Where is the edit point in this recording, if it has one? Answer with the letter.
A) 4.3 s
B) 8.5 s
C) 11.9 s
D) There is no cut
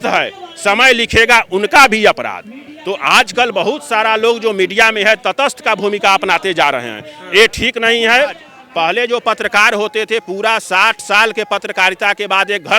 B